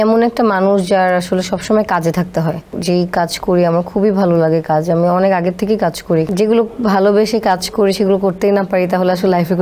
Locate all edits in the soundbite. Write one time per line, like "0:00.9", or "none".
0:02.7
0:06.3